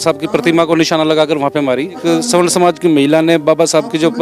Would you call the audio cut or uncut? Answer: cut